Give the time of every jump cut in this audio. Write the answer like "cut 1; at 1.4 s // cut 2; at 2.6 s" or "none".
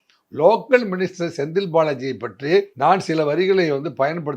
cut 1; at 2.7 s